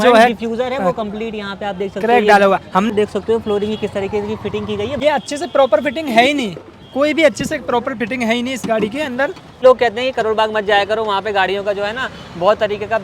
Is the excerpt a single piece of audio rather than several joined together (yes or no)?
no